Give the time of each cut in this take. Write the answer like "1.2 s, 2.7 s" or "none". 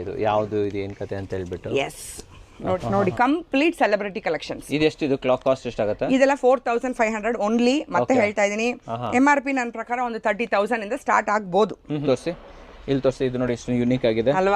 2.8 s, 12.0 s